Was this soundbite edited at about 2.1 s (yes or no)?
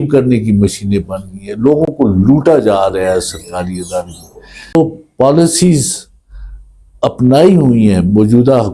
no